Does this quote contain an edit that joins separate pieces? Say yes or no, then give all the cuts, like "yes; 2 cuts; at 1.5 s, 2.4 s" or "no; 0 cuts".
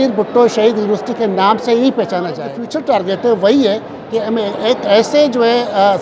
yes; 1 cut; at 2.6 s